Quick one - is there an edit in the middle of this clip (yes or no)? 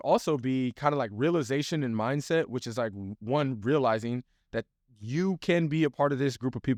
no